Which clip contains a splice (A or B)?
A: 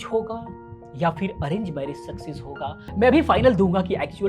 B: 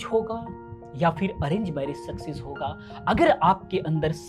A